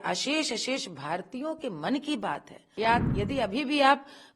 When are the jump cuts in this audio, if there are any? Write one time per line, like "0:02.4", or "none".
0:02.6